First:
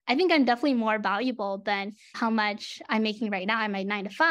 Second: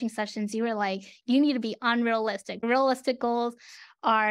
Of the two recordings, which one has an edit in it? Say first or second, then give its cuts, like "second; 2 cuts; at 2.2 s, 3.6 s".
second; 2 cuts; at 1.1 s, 2.6 s